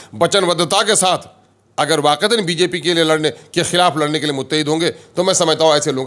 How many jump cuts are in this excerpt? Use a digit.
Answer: 0